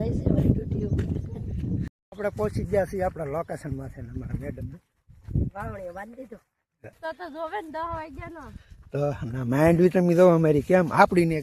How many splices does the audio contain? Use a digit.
2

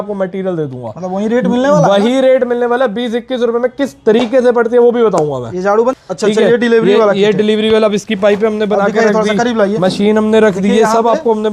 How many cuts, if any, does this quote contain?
1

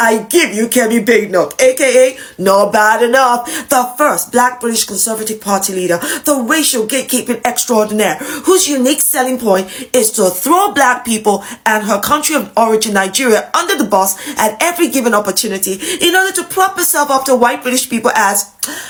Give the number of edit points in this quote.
0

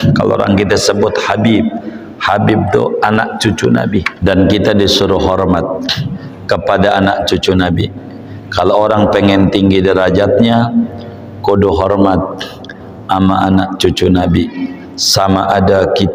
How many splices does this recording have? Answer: 1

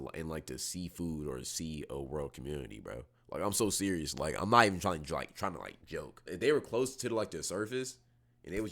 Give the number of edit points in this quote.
1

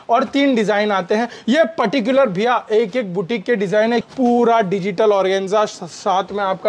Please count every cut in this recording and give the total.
1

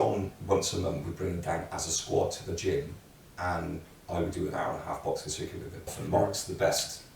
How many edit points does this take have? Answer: 1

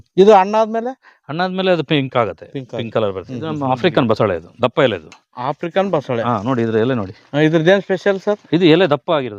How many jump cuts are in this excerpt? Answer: 1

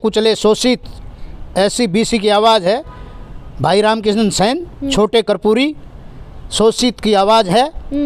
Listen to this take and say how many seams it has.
0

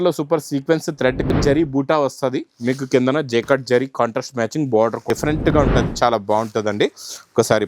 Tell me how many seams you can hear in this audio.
2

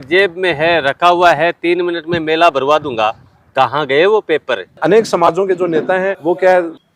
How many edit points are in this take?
1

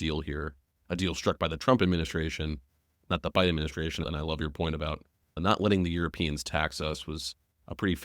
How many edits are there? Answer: 2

